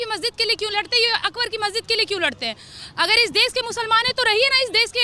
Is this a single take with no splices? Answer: yes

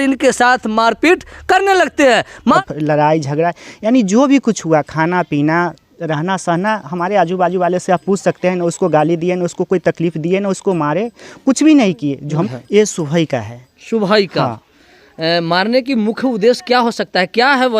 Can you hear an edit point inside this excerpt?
yes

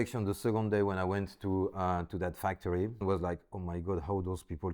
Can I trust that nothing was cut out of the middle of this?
no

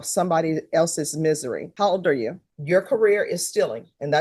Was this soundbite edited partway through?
yes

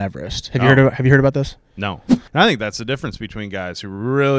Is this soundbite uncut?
no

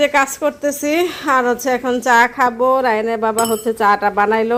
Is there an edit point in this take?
no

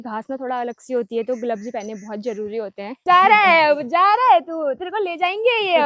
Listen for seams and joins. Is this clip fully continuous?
no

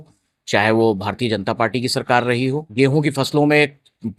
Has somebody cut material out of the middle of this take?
yes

